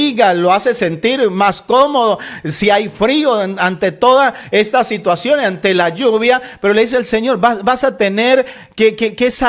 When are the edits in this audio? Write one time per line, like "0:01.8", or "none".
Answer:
none

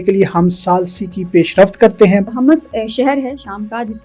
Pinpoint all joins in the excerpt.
0:02.3

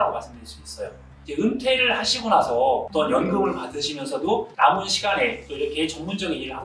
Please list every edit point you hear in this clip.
0:01.2
0:02.9
0:04.5

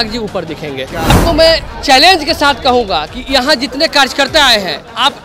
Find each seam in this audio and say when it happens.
0:01.1

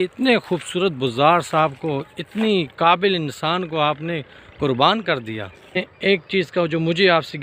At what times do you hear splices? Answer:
0:05.9

